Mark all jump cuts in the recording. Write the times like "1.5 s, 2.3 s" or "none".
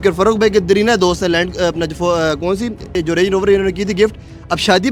none

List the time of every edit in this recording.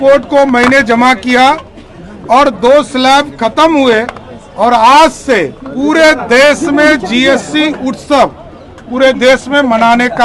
none

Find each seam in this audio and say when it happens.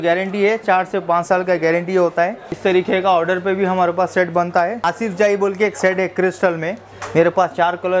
2.5 s, 4.9 s, 6.9 s

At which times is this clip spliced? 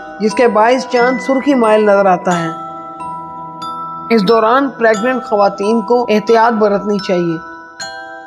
none

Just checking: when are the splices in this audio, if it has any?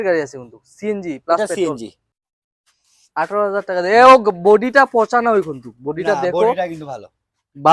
2.0 s

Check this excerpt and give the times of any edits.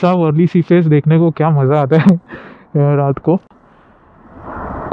3.5 s

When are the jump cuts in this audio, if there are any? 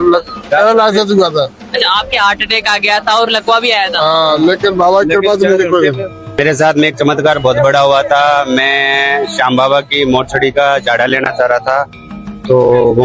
6.4 s

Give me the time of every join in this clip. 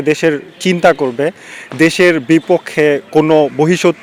none

